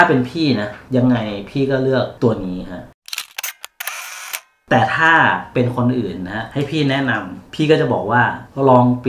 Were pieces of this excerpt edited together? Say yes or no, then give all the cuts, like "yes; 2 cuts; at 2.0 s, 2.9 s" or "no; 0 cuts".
yes; 2 cuts; at 2.8 s, 4.6 s